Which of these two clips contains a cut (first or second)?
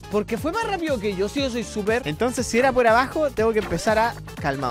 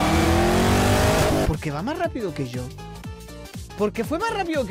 first